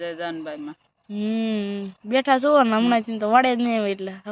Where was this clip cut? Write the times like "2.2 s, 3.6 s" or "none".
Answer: none